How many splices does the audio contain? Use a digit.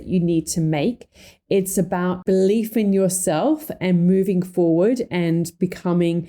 1